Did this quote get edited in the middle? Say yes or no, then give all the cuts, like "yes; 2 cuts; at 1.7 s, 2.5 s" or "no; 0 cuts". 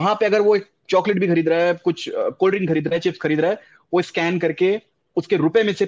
no; 0 cuts